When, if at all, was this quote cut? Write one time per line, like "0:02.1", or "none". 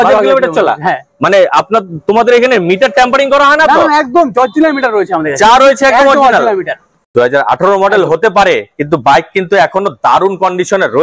0:07.0